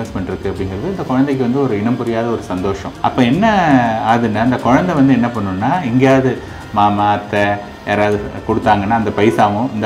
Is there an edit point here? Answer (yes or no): yes